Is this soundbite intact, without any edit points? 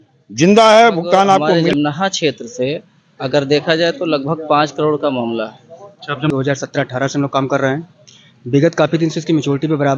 no; 2 cuts; at 1.6 s, 6.3 s

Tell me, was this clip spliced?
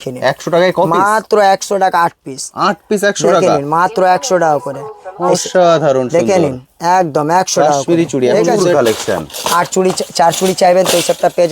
yes; 1 cut; at 8.7 s

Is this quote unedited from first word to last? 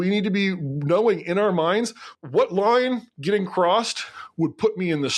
yes; 0 cuts

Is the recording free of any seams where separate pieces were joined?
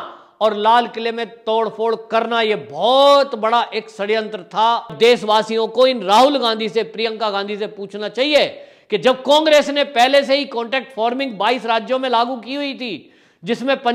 no; 1 cut; at 4.9 s

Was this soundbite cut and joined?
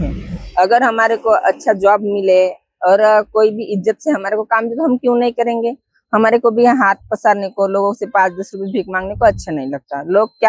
no; 0 cuts

